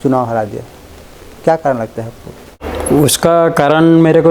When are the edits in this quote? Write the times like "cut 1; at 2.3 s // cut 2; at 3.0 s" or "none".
none